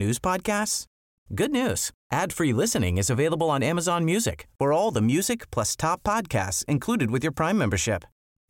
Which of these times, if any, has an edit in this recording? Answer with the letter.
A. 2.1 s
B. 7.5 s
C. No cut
C